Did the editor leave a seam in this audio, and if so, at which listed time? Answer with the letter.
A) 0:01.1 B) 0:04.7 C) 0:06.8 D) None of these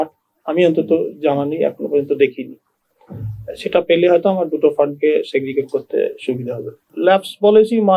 C